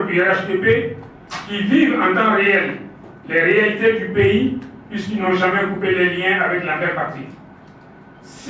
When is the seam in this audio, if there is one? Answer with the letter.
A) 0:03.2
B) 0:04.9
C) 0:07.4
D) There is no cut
D